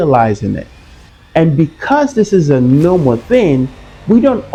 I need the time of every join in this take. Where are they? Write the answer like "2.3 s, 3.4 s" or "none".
none

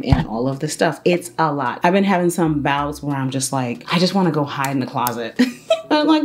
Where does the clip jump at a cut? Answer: 1.7 s

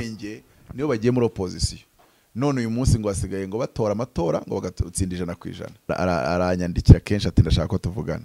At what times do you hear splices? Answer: 5.9 s

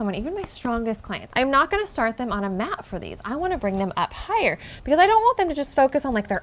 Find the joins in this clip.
1.2 s

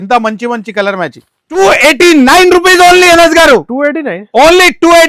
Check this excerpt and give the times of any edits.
1.6 s

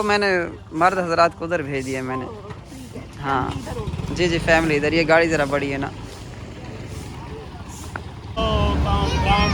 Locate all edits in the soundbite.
none

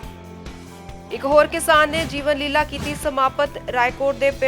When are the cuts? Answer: 1.0 s

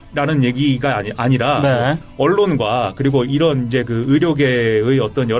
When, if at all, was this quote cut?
2.0 s

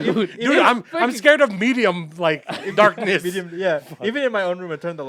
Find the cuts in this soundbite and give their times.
none

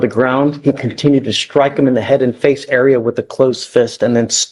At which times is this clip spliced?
none

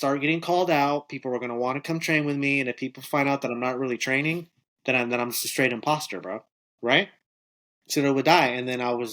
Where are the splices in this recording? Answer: 7.9 s

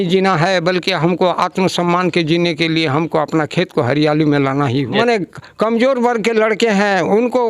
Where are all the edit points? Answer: 4.9 s

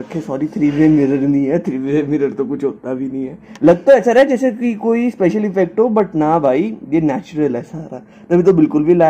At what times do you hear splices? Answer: 3.4 s

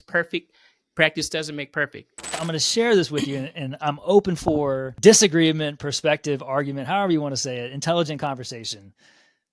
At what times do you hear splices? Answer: 2.4 s, 4.9 s

